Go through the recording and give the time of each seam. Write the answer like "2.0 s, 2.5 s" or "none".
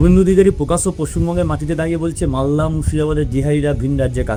none